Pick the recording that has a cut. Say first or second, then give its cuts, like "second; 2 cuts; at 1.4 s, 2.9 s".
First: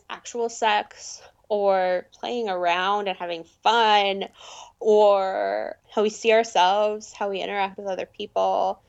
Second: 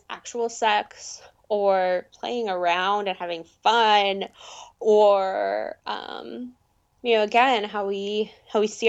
first; 1 cut; at 5.8 s